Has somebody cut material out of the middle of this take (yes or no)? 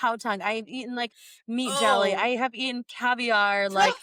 no